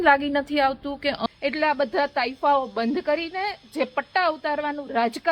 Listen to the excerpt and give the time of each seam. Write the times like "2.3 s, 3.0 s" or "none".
1.2 s